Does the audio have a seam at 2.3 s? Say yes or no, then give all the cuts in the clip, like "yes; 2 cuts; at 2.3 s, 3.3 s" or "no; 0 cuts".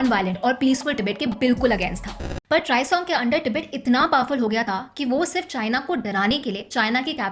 yes; 1 cut; at 2.3 s